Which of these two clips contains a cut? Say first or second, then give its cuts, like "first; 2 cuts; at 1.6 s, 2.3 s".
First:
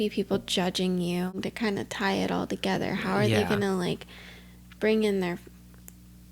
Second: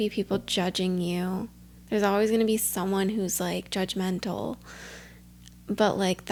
first; 1 cut; at 1.4 s